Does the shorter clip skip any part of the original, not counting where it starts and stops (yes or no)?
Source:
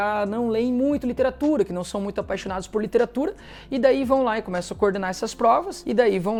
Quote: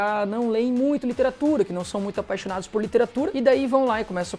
yes